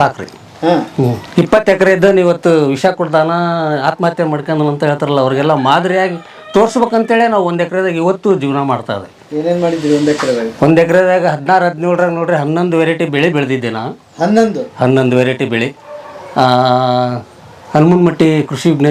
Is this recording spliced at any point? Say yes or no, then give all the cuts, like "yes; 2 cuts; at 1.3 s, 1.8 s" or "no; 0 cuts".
no; 0 cuts